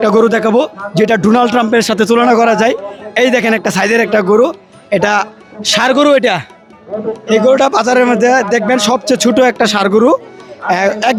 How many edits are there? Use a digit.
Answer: 0